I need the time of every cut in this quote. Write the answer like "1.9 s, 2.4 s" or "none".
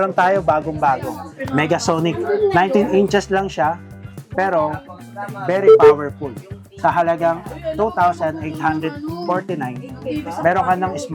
none